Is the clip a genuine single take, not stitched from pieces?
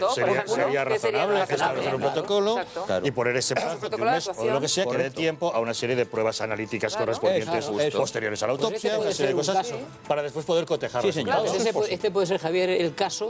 no; 1 cut; at 7.9 s

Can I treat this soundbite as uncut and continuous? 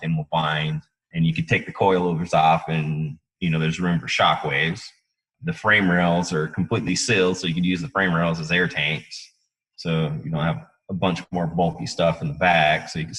no; 2 cuts; at 1.0 s, 5.3 s

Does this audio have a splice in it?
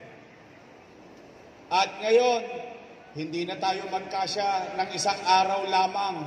no; 0 cuts

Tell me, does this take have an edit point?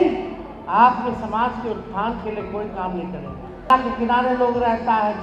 yes; 1 cut; at 3.7 s

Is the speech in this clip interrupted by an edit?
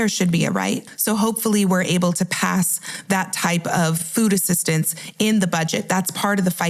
yes; 1 cut; at 0.9 s

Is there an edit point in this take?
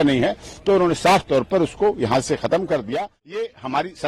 yes; 1 cut; at 2.9 s

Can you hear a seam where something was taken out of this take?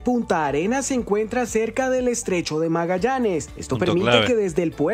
no; 0 cuts

